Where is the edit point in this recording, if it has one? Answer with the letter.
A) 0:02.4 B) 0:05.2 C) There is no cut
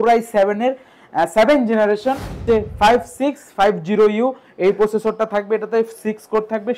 A